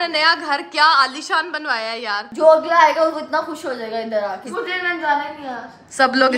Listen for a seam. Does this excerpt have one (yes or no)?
yes